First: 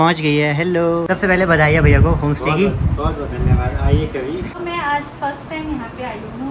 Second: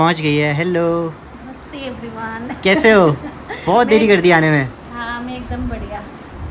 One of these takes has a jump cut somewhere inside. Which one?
first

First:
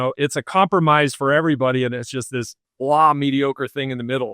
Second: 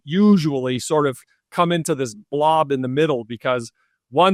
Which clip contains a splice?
first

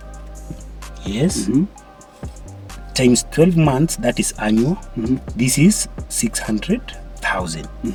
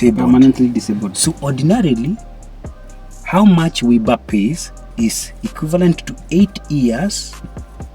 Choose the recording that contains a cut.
second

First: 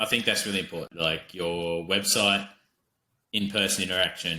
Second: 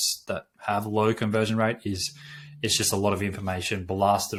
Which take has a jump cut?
first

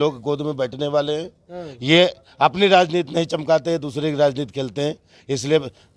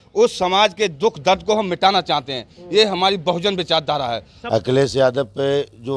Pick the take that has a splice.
second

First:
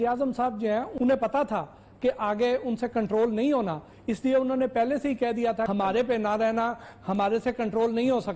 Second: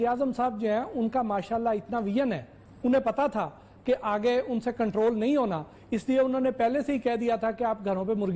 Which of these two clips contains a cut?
first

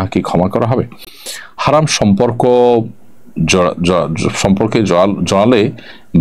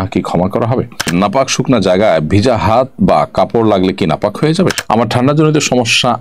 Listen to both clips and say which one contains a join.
second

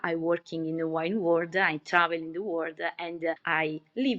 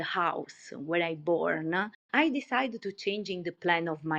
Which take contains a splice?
second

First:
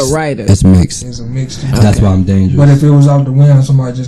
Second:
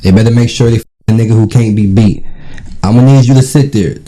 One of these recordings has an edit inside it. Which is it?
second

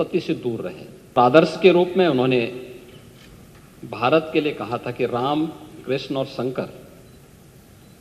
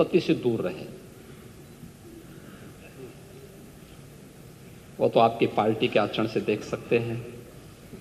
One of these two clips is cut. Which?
first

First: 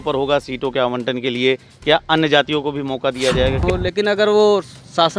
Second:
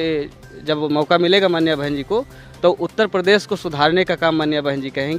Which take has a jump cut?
first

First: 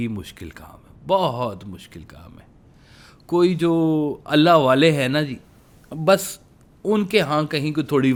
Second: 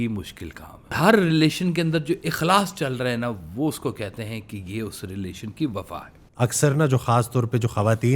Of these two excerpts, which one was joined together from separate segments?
second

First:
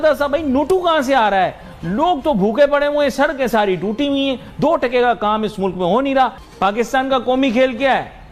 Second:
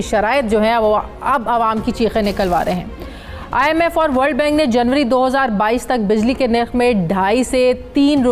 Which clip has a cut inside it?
first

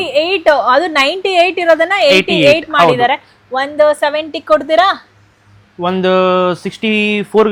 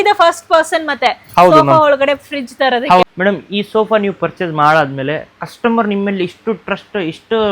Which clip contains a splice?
second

